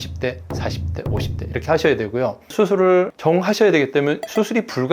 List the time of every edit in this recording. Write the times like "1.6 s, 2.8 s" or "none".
2.4 s